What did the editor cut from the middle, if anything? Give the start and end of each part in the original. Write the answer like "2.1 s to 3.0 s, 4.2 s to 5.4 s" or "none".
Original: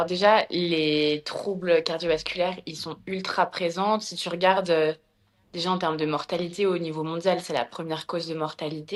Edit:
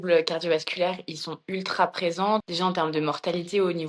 4.1 s to 5.6 s